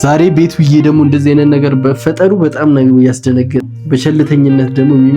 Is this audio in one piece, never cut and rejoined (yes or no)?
no